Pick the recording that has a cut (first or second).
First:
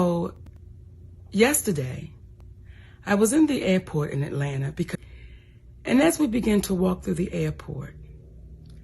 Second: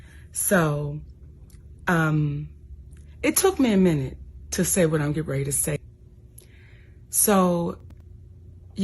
second